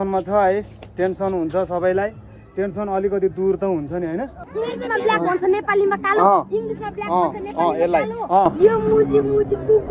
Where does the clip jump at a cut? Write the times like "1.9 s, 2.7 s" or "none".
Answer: 4.4 s, 8.5 s